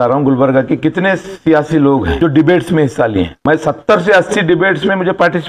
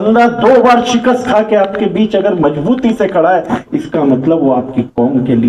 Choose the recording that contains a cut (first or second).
first